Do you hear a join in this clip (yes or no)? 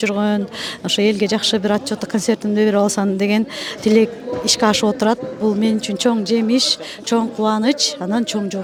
no